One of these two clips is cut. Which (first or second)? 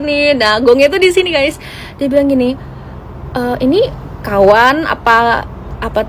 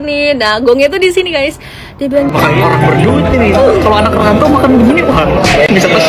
second